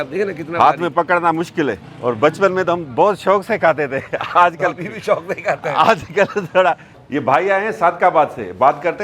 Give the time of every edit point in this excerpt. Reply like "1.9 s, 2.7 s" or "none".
1.9 s, 6.9 s